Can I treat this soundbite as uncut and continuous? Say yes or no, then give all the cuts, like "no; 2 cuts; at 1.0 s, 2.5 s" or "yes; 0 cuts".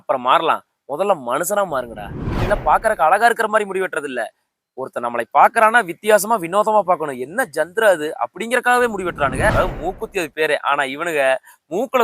no; 2 cuts; at 2.3 s, 9.5 s